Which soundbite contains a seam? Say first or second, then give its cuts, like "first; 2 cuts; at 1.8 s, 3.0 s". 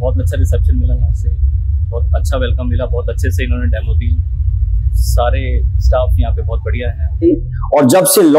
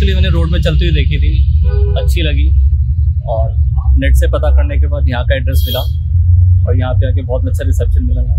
first; 1 cut; at 7.2 s